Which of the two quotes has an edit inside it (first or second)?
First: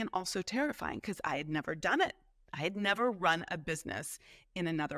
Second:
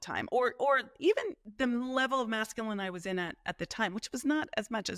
second